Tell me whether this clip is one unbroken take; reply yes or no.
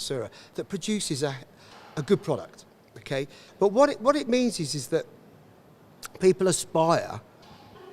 no